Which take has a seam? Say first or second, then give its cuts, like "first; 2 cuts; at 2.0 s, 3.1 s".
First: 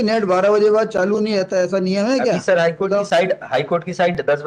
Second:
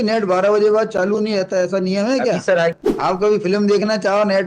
second; 1 cut; at 3.2 s